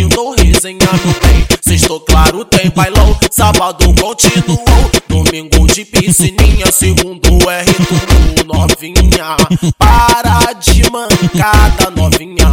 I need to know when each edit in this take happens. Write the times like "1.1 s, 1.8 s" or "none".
1.1 s